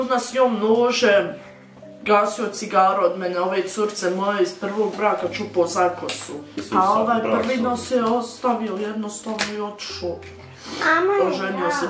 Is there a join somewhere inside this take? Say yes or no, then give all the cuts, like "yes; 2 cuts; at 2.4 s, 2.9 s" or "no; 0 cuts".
no; 0 cuts